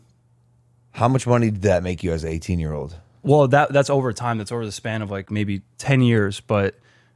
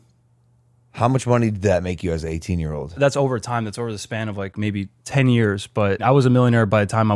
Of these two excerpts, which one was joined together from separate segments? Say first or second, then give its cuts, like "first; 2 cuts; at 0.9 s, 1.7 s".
second; 2 cuts; at 3.0 s, 6.0 s